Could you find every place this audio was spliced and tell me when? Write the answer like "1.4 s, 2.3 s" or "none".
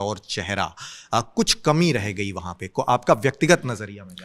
none